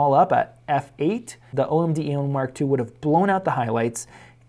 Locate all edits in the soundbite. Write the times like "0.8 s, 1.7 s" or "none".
1.5 s